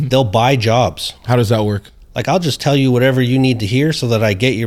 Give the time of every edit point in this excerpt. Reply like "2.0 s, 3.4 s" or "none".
1.2 s